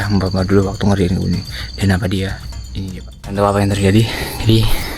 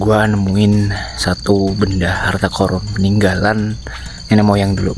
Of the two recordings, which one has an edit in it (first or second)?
first